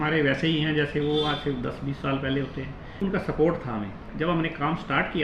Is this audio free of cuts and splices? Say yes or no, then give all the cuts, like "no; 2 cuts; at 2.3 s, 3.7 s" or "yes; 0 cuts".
no; 2 cuts; at 3.0 s, 4.1 s